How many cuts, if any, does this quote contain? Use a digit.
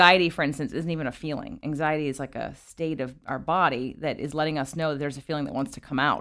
0